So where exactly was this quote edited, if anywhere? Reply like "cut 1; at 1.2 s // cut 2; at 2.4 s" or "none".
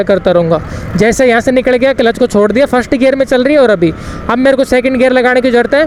none